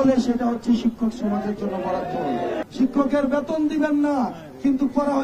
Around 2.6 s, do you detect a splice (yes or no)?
yes